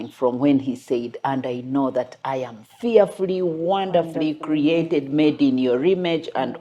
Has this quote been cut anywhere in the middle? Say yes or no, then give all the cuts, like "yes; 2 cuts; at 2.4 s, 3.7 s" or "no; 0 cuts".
no; 0 cuts